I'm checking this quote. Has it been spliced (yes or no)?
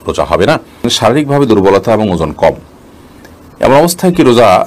yes